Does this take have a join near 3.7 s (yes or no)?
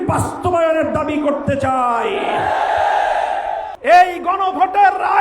yes